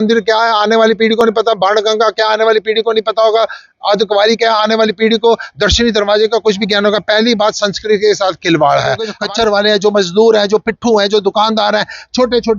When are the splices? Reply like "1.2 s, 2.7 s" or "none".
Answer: 9.1 s